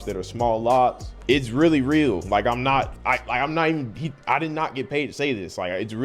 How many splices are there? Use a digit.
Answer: 1